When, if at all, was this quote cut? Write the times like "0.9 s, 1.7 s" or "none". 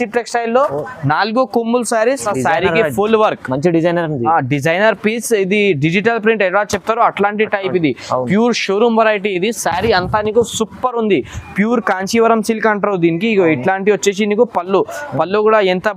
2.2 s